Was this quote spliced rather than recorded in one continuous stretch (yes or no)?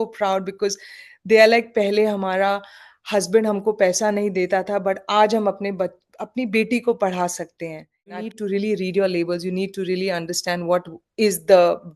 yes